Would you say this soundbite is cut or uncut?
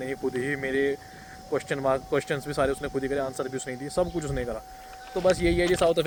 uncut